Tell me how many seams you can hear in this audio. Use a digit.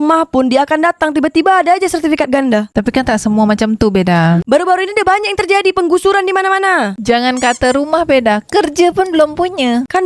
1